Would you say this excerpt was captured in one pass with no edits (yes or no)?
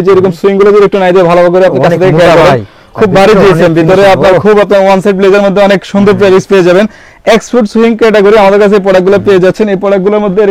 yes